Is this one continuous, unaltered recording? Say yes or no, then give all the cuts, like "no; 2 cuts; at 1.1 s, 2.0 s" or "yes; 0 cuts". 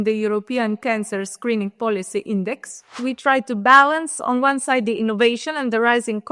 no; 1 cut; at 3.0 s